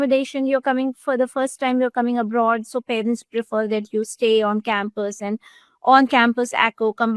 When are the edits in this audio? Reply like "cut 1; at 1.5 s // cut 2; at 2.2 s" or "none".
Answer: none